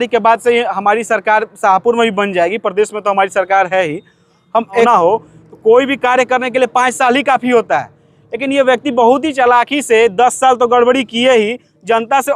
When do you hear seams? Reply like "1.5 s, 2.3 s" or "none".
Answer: 4.9 s